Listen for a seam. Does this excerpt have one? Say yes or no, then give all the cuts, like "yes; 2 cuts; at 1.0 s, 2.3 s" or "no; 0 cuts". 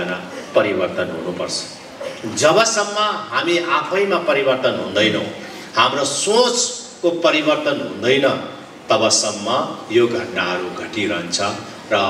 no; 0 cuts